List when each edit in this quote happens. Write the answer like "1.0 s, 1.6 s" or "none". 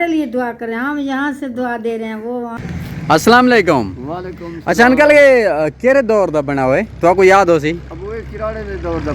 2.5 s